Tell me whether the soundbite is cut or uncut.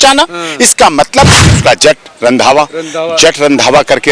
cut